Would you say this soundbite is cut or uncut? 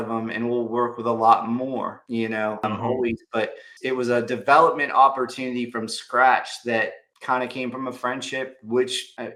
uncut